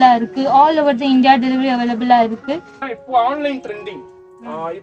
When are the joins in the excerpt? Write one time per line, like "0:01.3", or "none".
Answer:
0:02.8

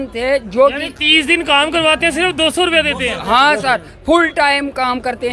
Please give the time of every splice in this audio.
none

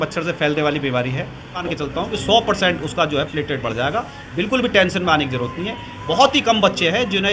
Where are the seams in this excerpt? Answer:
0:01.6

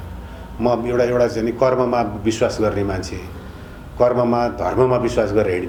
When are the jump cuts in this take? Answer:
none

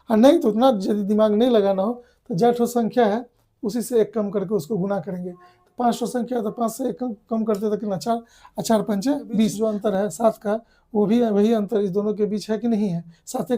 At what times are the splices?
0:09.5

